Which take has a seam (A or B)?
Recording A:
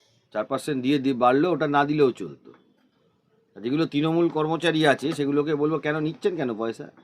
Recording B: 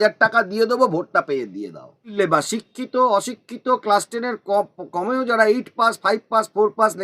B